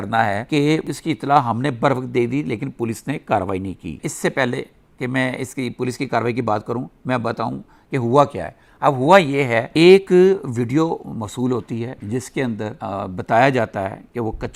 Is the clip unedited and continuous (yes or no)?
yes